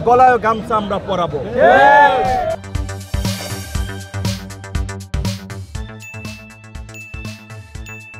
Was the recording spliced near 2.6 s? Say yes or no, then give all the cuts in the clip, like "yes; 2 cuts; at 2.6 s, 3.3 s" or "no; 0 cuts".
no; 0 cuts